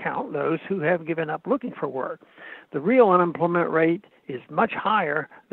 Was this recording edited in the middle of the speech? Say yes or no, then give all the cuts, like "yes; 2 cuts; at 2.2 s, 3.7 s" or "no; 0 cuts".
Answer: no; 0 cuts